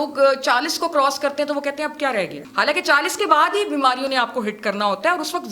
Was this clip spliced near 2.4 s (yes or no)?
yes